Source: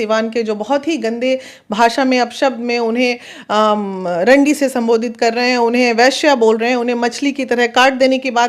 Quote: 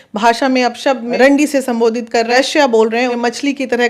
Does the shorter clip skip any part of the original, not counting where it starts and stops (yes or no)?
yes